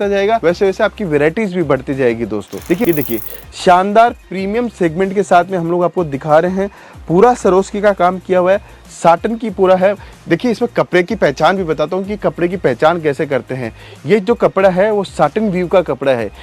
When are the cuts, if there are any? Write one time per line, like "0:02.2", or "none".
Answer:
0:02.9